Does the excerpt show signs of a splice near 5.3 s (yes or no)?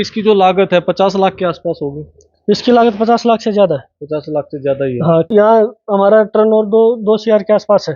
yes